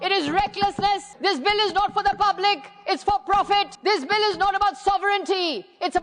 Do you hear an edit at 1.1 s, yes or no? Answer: yes